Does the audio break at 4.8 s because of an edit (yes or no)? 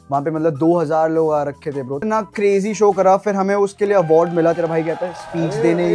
no